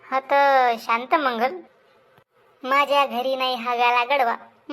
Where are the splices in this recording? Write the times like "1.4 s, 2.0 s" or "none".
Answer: 1.6 s